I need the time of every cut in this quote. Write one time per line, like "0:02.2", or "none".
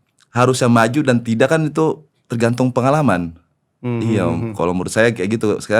none